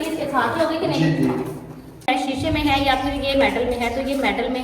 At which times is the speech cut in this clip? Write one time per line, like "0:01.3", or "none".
0:02.1